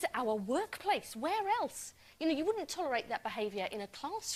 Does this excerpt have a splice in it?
no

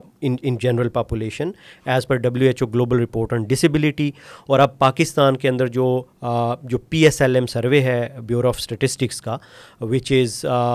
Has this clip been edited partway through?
no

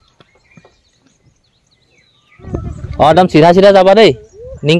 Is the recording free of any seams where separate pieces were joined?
no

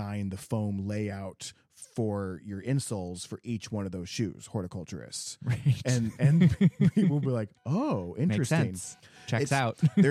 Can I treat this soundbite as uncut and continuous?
yes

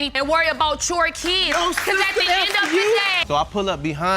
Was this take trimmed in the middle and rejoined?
yes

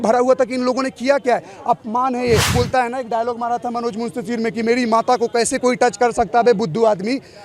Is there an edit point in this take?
yes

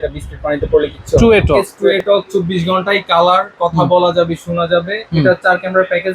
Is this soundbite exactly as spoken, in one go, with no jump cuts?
no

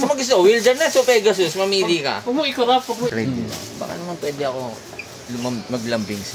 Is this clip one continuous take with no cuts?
no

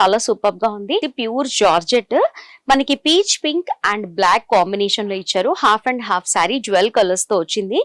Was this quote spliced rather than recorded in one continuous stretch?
yes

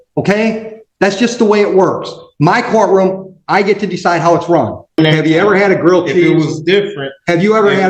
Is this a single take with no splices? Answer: no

